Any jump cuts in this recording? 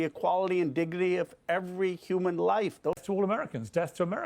yes; 1 cut; at 3.0 s

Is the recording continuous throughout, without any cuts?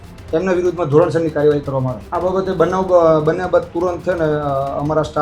no; 1 cut; at 2.0 s

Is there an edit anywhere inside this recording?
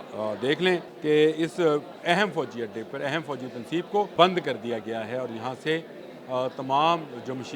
yes; 3 cuts; at 0.9 s, 1.9 s, 4.1 s

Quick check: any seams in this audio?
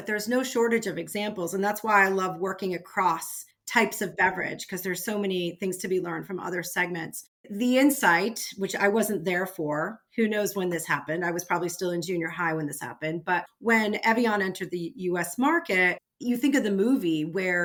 no; 0 cuts

